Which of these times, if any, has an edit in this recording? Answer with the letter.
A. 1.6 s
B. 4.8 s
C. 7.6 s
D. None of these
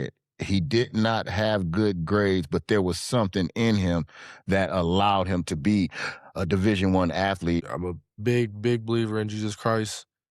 C